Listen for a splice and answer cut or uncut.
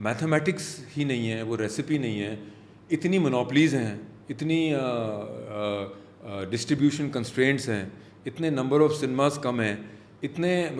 uncut